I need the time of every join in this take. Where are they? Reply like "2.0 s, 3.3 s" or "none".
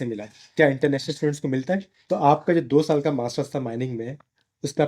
1.9 s